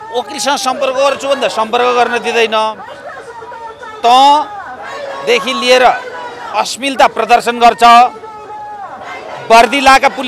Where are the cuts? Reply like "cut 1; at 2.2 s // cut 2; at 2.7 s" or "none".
none